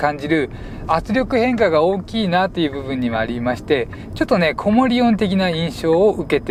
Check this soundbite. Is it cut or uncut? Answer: uncut